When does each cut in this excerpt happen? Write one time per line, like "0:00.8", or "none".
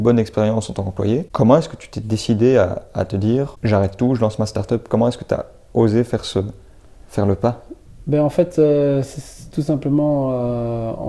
0:01.3
0:03.6